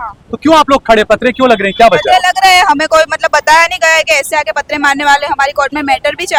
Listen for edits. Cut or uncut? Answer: uncut